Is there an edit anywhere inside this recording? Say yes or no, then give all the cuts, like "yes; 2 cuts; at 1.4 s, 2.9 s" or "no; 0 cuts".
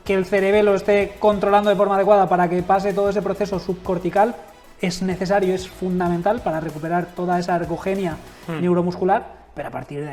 no; 0 cuts